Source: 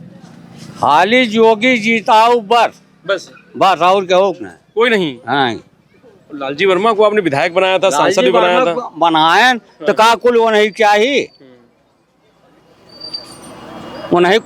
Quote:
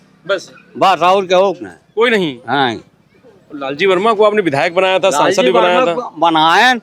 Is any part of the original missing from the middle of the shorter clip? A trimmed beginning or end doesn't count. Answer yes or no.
no